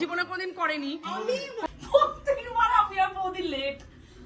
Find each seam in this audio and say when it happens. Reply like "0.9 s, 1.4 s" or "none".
1.6 s